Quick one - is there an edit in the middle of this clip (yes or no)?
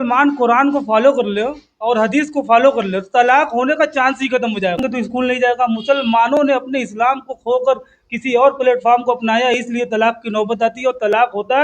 yes